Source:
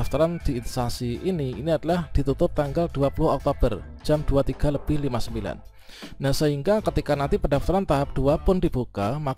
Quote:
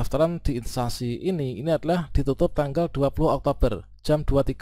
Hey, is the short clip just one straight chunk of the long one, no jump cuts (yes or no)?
yes